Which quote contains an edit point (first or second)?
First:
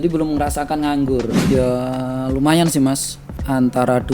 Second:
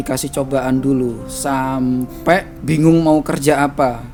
first